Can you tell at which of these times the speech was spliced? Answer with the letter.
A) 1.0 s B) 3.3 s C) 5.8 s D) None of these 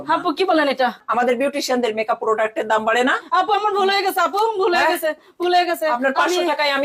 A